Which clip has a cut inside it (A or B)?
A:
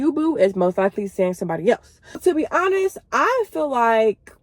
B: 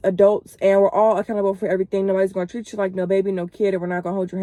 A